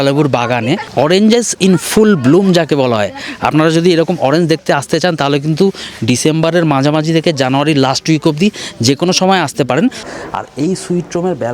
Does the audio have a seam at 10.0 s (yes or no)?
yes